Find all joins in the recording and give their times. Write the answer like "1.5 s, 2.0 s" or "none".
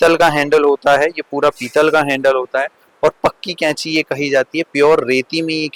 none